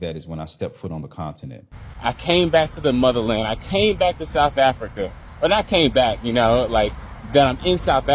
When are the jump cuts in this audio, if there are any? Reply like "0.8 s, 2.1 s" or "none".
1.8 s